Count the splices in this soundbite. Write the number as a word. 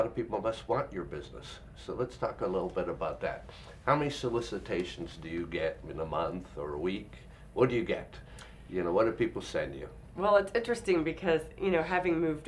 zero